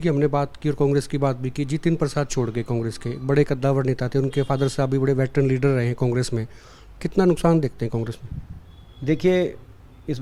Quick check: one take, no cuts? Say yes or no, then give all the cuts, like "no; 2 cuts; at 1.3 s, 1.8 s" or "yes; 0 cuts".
yes; 0 cuts